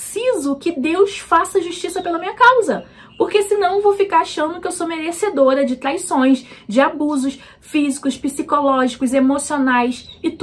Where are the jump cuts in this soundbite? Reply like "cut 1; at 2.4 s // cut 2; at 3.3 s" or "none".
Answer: none